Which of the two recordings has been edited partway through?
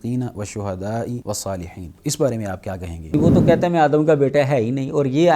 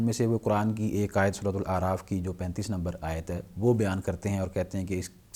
first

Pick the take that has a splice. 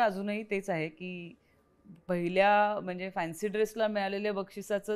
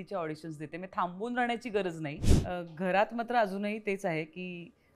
second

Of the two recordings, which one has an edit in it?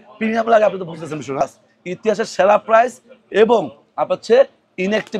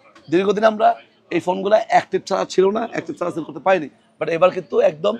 first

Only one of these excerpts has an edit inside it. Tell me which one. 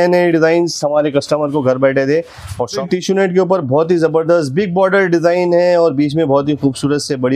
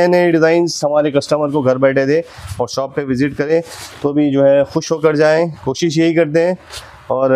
first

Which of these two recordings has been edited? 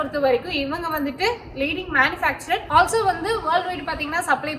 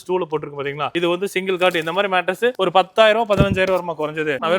second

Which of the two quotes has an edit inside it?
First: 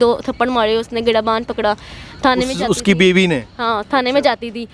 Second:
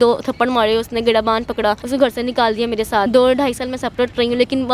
second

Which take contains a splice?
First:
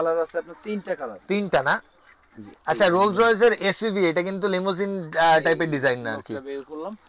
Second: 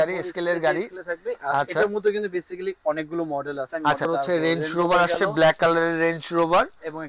second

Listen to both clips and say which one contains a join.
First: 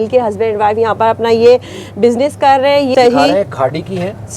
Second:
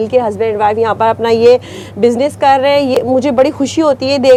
first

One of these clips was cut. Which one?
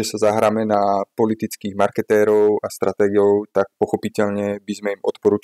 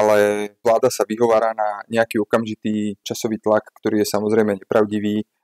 second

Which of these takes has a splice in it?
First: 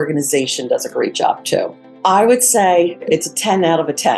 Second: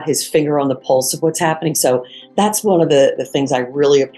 first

